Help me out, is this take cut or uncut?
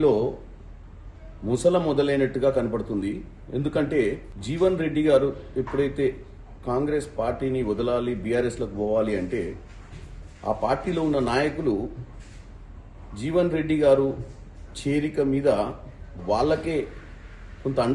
cut